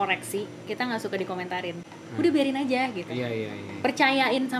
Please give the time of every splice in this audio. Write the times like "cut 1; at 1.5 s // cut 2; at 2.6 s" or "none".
none